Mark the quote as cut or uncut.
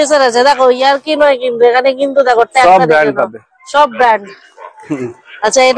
uncut